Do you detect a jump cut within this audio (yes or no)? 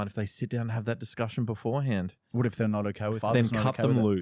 yes